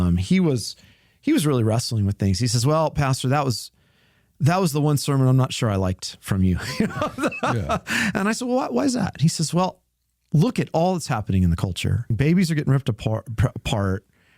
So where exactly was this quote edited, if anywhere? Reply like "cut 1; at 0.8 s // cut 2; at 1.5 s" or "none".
cut 1; at 12.1 s